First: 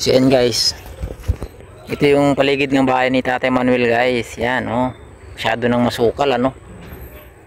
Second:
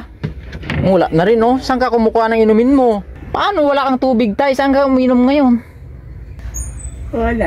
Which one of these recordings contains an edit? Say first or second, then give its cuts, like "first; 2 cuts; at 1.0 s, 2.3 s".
second; 1 cut; at 3.2 s